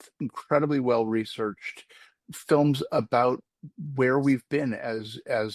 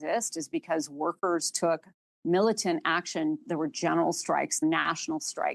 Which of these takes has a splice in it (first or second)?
second